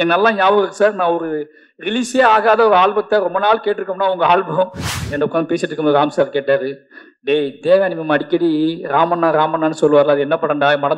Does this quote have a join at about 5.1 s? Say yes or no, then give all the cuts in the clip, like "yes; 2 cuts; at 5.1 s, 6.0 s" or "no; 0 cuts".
yes; 1 cut; at 5.1 s